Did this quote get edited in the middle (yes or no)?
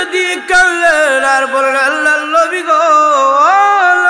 no